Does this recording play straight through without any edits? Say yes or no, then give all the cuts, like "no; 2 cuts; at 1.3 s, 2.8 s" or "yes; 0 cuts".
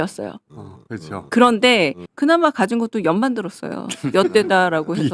no; 1 cut; at 2.0 s